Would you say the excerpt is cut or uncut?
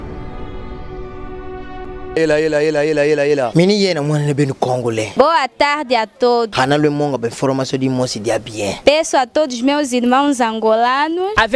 uncut